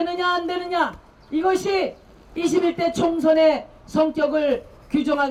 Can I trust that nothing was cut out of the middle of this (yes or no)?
yes